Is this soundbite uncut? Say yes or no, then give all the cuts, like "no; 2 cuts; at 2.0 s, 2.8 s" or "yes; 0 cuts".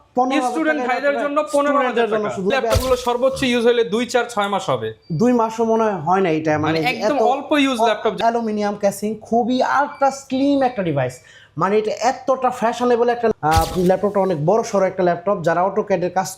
no; 3 cuts; at 2.5 s, 8.2 s, 13.3 s